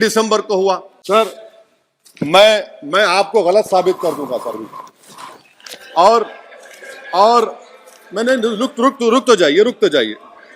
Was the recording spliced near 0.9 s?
yes; 1 cut; at 0.9 s

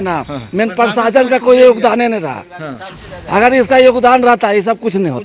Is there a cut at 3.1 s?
no; 0 cuts

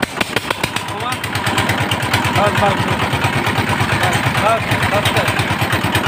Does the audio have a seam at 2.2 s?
no; 0 cuts

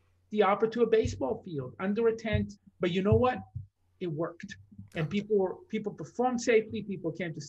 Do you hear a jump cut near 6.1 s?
no; 1 cut; at 2.6 s

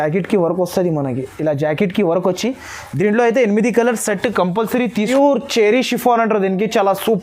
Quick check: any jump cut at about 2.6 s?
no; 1 cut; at 5.0 s

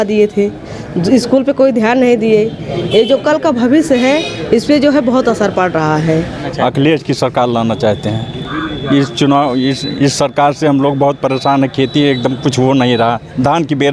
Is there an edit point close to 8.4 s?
yes; 2 cuts; at 6.5 s, 8.4 s

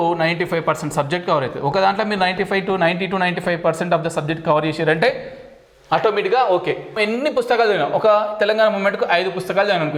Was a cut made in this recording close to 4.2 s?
no; 1 cut; at 7.0 s

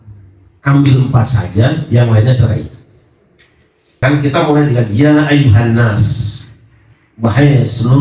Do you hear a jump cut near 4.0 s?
yes; 1 cut; at 4.0 s

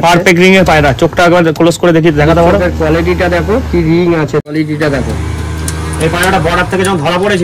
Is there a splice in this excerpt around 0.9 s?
no; 1 cut; at 4.4 s

